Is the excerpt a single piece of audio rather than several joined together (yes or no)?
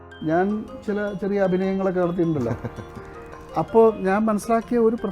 yes